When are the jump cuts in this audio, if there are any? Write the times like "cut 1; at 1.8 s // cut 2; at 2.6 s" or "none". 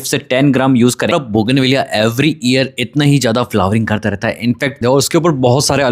cut 1; at 1.1 s // cut 2; at 4.8 s